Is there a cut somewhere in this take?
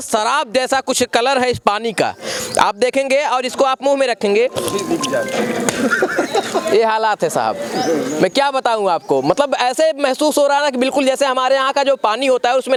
no; 0 cuts

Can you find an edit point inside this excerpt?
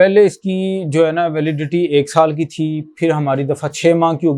no; 0 cuts

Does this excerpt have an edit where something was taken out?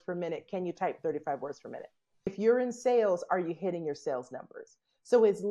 yes; 1 cut; at 2.3 s

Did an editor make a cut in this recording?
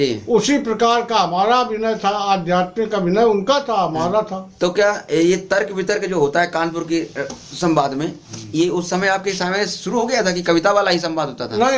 no; 0 cuts

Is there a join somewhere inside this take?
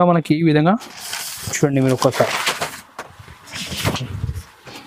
no; 0 cuts

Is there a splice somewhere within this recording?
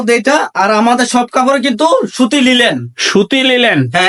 no; 0 cuts

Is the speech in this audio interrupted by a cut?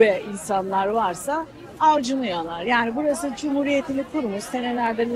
no; 0 cuts

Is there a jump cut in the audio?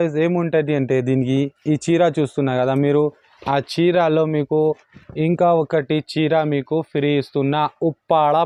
no; 0 cuts

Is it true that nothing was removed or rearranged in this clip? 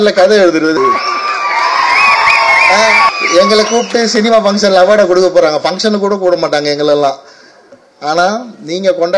no; 2 cuts; at 0.7 s, 3.1 s

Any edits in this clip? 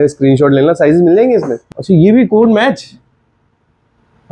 yes; 1 cut; at 1.6 s

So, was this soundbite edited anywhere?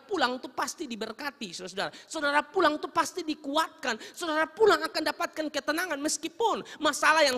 no; 0 cuts

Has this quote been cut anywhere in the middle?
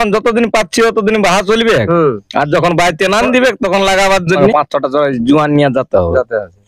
yes; 1 cut; at 4.4 s

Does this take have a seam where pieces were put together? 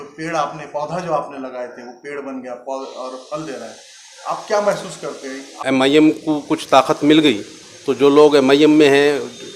yes; 1 cut; at 5.5 s

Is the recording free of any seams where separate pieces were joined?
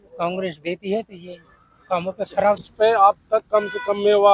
no; 1 cut; at 2.6 s

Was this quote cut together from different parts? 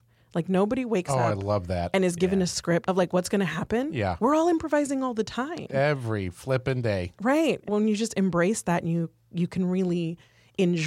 yes; 2 cuts; at 2.8 s, 7.7 s

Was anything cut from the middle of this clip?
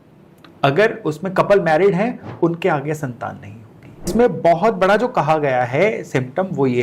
yes; 1 cut; at 4.1 s

